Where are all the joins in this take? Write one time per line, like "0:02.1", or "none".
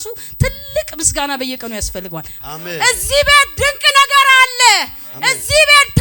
0:02.4

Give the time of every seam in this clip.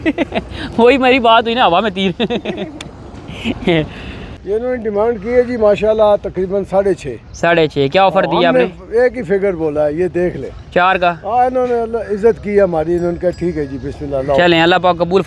0:04.3

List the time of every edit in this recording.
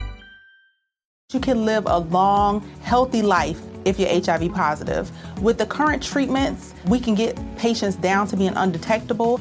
0:01.2

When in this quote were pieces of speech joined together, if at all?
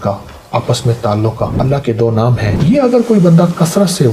0:01.6
0:02.5

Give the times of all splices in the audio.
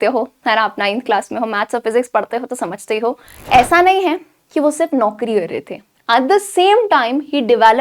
0:03.5

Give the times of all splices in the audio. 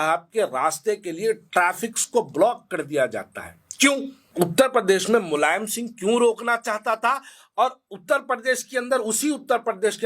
0:04.2

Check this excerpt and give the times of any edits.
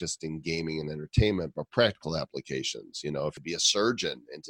0:03.4

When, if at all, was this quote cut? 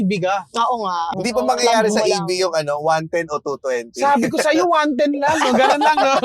0:01.1

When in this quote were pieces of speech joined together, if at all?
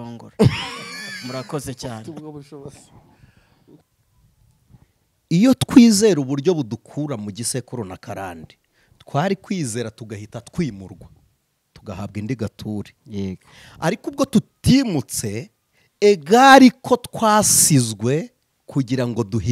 0:03.6

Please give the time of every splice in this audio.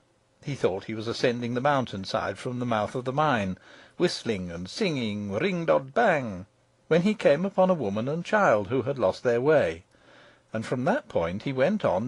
0:06.0

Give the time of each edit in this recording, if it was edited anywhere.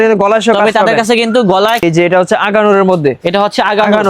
0:01.8

